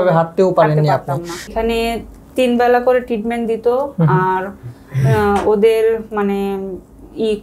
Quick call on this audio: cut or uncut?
cut